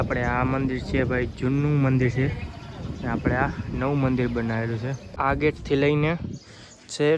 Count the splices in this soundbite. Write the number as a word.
one